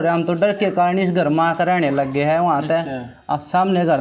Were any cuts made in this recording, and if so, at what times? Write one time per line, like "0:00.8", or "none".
none